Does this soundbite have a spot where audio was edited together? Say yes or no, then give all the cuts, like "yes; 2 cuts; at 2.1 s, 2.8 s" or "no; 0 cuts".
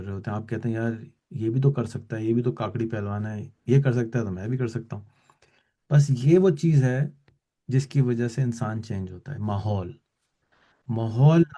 no; 0 cuts